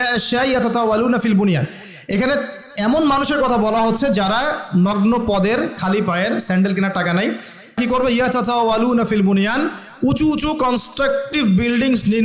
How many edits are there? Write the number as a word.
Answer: one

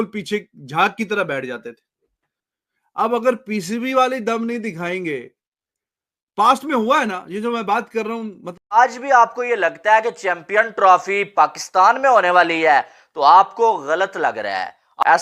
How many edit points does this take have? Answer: one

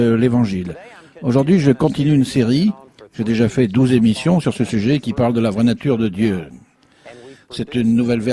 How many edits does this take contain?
one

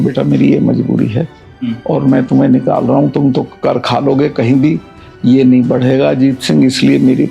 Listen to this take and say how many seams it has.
one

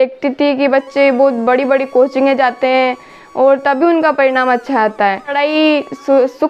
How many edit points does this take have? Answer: one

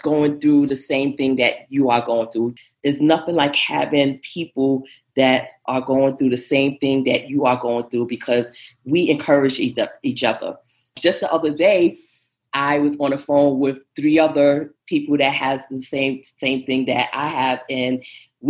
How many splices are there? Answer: one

